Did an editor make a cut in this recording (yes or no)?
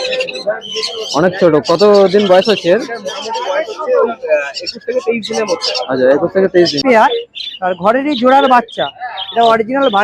yes